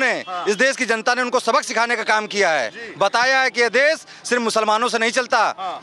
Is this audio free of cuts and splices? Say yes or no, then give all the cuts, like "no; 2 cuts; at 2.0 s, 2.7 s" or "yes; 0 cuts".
yes; 0 cuts